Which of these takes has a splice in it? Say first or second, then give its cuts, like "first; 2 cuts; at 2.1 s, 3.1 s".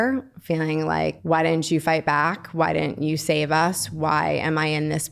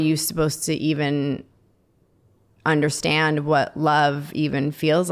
first; 1 cut; at 1.2 s